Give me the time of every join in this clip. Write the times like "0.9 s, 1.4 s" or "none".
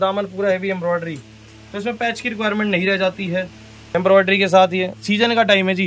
3.7 s